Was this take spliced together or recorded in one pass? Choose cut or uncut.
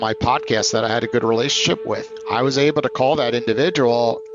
uncut